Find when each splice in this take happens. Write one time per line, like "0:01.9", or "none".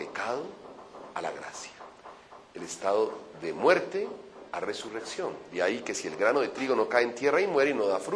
0:05.5